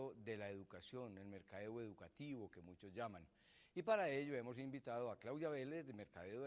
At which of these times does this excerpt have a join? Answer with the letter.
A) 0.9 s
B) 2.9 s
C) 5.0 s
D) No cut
C